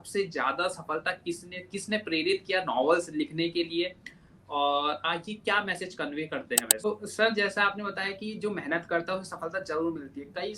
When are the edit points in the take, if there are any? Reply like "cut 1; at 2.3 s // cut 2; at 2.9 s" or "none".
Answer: cut 1; at 6.9 s